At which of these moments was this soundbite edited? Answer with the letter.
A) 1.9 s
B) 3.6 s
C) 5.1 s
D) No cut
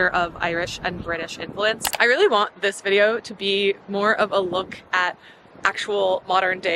A